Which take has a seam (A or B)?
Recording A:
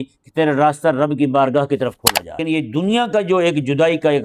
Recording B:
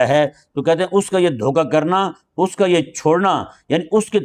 A